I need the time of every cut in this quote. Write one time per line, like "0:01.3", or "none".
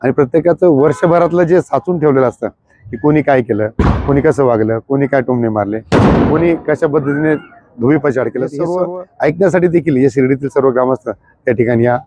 0:08.6